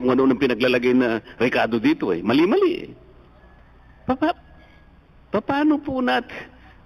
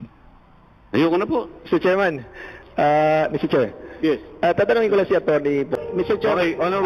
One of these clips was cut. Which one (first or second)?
second